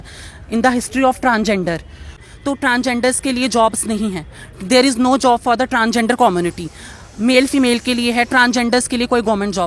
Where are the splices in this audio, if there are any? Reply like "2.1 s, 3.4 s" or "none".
2.1 s